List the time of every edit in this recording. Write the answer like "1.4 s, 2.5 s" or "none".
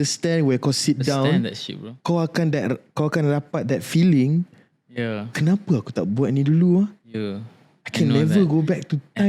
none